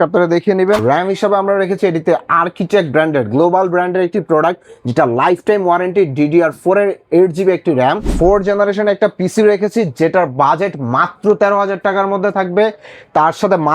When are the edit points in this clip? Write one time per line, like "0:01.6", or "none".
0:00.8
0:08.1